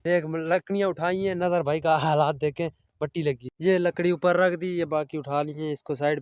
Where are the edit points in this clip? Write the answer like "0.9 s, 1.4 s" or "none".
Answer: 3.5 s